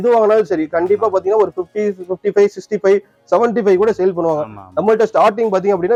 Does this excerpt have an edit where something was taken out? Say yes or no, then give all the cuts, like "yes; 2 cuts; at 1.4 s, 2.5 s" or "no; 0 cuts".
no; 0 cuts